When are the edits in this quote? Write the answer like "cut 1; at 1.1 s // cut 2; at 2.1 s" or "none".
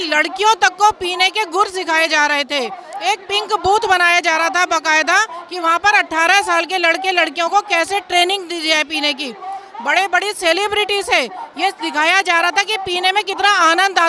none